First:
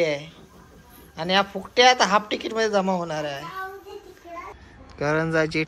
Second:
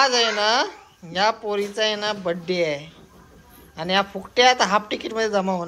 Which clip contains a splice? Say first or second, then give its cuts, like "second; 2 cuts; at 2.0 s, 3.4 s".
first; 1 cut; at 4.6 s